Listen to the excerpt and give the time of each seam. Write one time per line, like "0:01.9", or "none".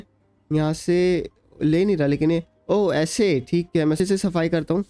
0:04.0